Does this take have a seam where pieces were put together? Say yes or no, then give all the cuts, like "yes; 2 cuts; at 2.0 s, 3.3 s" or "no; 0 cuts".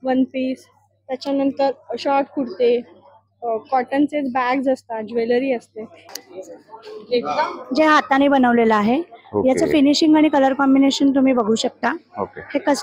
yes; 1 cut; at 6.2 s